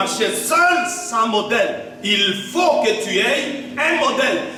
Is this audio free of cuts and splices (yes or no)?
yes